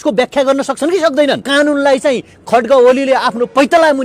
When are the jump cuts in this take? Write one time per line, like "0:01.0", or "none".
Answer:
0:01.4